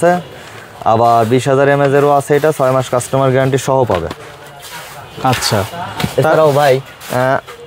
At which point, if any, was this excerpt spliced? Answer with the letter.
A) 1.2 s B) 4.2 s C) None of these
C